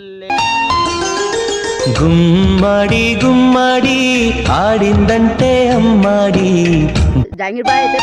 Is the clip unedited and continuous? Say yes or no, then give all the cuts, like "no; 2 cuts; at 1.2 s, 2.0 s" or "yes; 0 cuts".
yes; 0 cuts